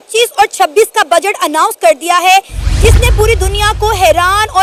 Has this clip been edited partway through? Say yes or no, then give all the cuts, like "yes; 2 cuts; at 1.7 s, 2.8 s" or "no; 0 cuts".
no; 0 cuts